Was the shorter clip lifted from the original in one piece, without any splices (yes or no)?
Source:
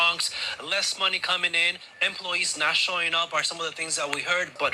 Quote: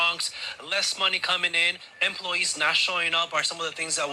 yes